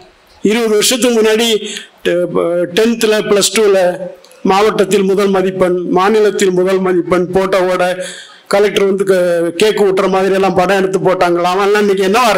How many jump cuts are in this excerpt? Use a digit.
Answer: 0